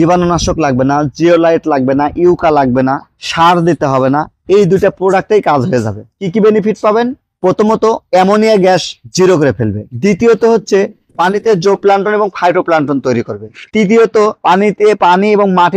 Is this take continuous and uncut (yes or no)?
yes